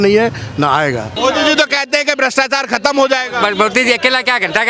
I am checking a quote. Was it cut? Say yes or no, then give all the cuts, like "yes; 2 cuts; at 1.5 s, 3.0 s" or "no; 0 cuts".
yes; 1 cut; at 1.1 s